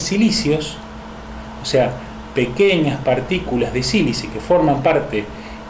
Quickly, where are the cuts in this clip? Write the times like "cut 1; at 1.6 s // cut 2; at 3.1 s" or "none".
none